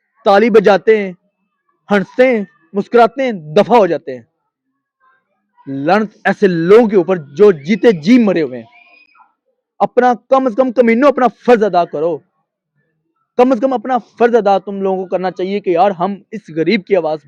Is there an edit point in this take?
no; 0 cuts

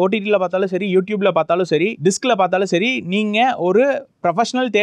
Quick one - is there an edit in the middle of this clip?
no; 0 cuts

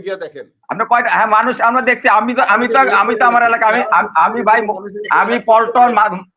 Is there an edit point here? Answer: no; 0 cuts

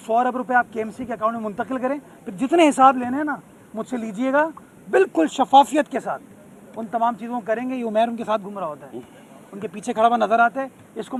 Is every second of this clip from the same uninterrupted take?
yes; 0 cuts

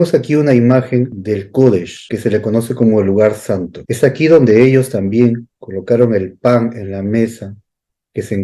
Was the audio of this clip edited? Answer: yes; 3 cuts; at 1.2 s, 2.0 s, 3.8 s

